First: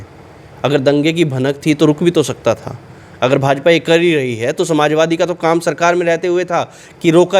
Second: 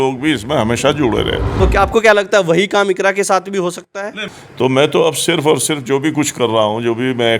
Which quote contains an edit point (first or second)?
second